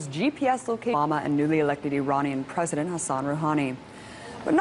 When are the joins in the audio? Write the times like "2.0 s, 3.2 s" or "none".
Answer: none